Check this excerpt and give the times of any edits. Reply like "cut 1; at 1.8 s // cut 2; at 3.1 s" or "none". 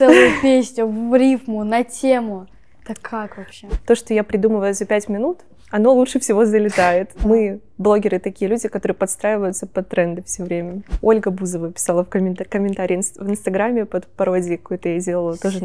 cut 1; at 3.6 s // cut 2; at 7.1 s // cut 3; at 10.8 s

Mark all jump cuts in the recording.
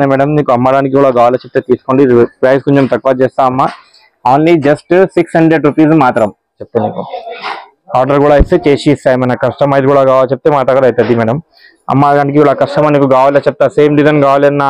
cut 1; at 6.6 s

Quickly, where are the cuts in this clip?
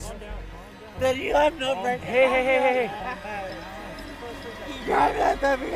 none

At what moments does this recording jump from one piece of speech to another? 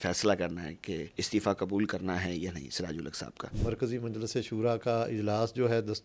cut 1; at 1.1 s // cut 2; at 3.5 s

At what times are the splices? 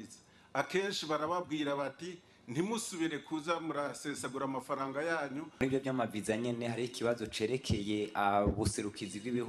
cut 1; at 5.6 s

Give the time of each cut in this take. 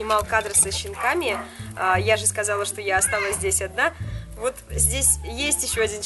none

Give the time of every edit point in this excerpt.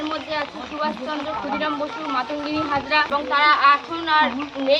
cut 1; at 3.1 s

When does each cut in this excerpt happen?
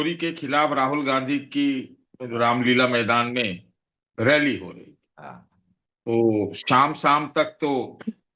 none

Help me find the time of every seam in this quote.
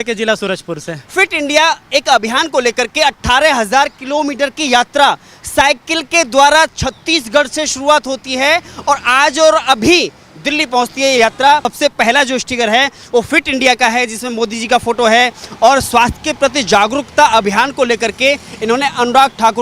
cut 1; at 1.0 s // cut 2; at 11.7 s

